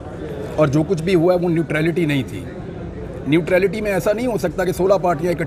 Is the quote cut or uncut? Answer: uncut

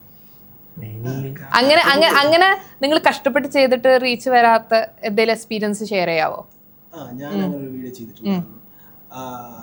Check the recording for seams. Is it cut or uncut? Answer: uncut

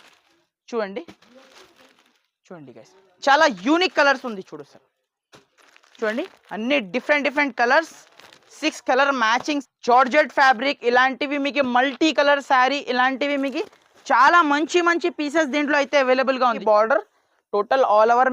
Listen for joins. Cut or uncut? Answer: cut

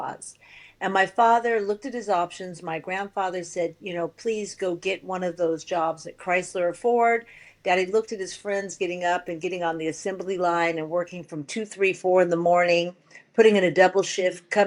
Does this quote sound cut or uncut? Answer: uncut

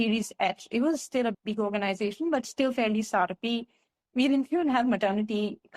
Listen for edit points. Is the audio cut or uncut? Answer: uncut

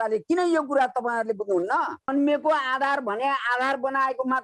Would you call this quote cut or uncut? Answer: cut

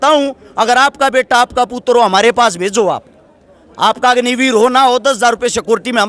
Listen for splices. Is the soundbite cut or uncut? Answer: uncut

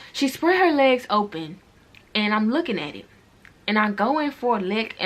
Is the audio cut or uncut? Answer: uncut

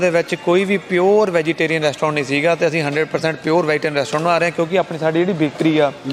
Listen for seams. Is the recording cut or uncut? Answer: uncut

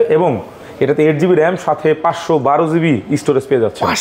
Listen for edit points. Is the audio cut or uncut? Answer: uncut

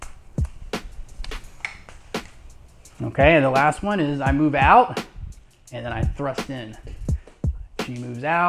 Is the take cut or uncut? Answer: cut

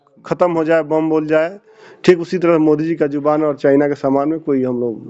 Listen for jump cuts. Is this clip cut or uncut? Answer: uncut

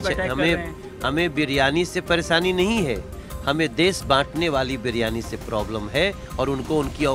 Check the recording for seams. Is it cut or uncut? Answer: uncut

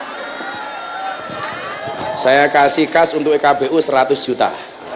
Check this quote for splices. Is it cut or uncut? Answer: uncut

